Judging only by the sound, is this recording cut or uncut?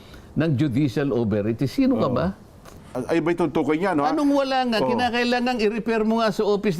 cut